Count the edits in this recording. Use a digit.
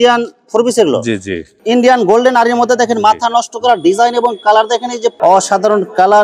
2